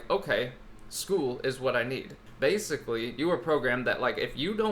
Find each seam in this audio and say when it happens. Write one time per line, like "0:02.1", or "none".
0:02.2